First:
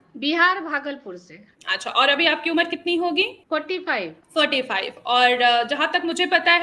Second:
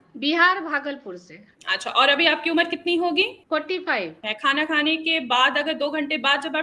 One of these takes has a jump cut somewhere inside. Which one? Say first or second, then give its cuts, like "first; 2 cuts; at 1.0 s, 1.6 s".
second; 1 cut; at 4.2 s